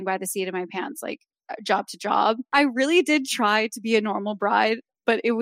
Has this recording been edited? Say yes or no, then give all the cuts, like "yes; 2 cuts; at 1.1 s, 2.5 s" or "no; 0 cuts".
yes; 1 cut; at 2.4 s